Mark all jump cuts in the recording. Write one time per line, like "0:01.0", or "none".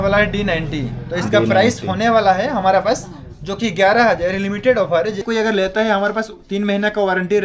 0:05.2